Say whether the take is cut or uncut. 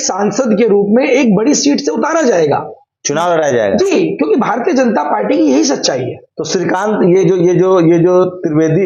uncut